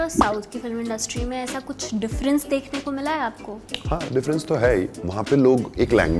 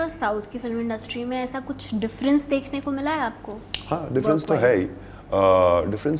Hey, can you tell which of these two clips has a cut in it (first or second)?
first